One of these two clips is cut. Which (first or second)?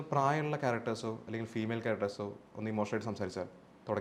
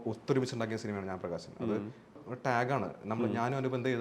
second